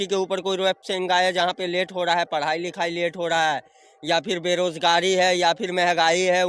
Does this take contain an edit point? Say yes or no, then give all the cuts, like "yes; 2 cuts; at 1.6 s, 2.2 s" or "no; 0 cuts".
no; 0 cuts